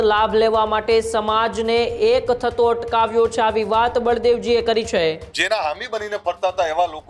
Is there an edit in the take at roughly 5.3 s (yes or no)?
yes